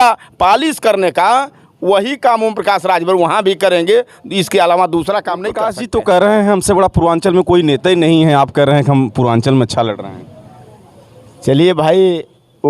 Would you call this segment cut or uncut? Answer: cut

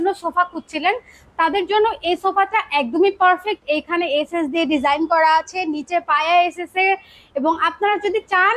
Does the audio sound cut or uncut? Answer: uncut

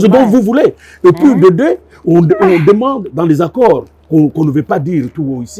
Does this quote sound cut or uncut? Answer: uncut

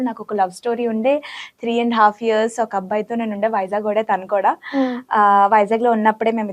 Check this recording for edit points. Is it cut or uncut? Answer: uncut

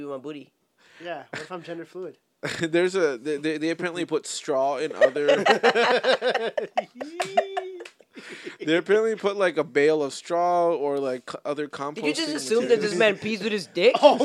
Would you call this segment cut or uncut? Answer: uncut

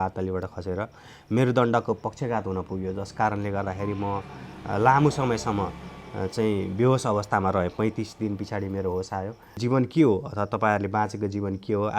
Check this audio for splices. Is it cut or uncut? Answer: cut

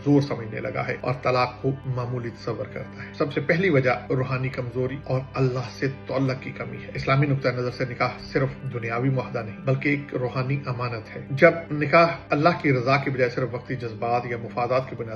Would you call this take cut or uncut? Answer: uncut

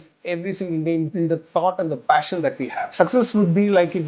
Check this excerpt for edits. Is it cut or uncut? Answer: cut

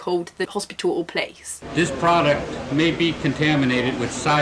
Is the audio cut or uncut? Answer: cut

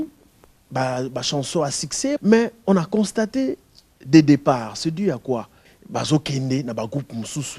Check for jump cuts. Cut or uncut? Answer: cut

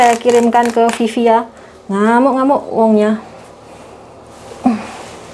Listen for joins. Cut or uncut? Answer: uncut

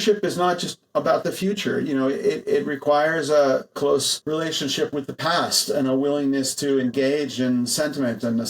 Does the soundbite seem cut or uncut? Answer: cut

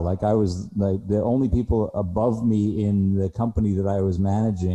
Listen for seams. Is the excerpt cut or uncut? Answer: uncut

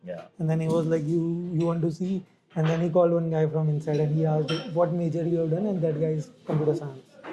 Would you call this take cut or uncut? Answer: uncut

